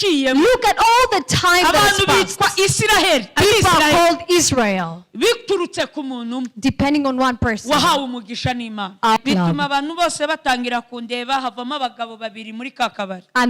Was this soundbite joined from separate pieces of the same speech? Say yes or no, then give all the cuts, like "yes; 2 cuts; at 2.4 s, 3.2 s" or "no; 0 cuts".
yes; 1 cut; at 9.2 s